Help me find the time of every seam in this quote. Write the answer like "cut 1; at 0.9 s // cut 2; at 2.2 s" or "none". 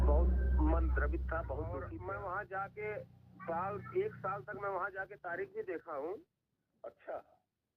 cut 1; at 1.8 s